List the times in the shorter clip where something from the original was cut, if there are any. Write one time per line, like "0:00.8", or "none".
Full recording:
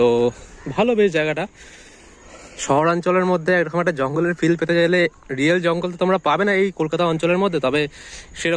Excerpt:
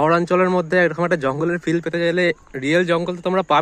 none